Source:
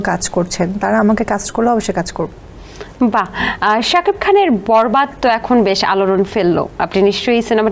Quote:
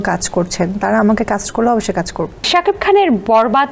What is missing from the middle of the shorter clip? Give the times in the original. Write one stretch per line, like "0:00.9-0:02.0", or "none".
0:02.5-0:03.9